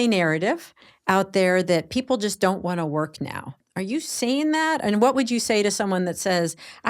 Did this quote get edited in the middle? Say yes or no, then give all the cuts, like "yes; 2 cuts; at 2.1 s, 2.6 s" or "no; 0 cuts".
yes; 1 cut; at 3.6 s